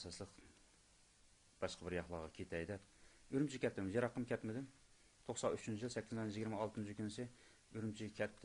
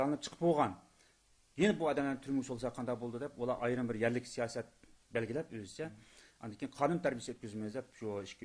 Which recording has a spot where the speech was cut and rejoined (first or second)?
second